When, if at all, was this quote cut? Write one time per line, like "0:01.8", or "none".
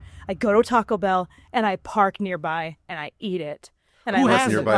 none

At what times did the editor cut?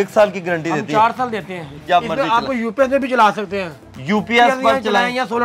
0:01.8

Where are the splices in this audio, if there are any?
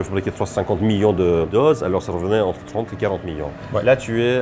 0:01.5

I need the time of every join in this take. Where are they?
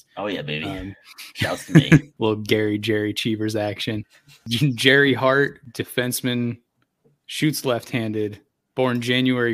0:02.1
0:04.5
0:05.6

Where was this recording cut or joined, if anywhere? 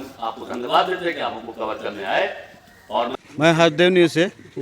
0:03.1

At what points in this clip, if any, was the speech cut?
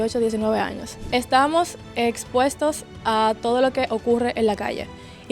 0:00.9

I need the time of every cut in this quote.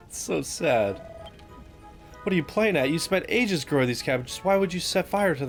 none

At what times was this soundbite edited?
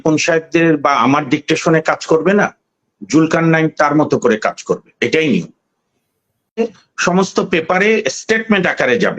0:06.6

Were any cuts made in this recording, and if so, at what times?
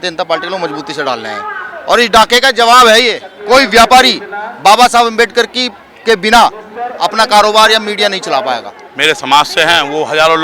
0:03.3
0:08.8

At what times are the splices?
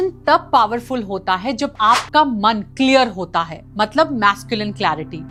none

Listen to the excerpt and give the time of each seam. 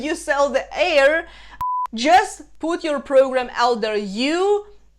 0:01.6

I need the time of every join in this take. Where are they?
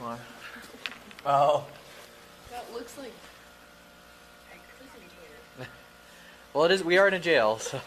none

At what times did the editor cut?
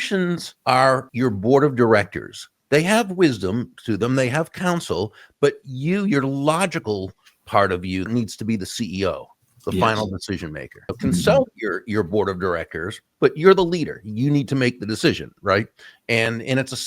0:00.8
0:08.1
0:10.9

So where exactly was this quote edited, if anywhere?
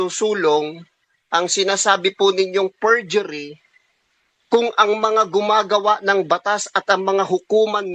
none

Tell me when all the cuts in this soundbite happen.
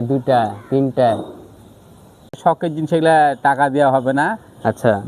0:02.4

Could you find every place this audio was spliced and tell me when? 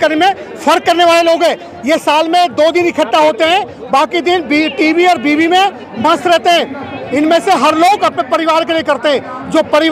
none

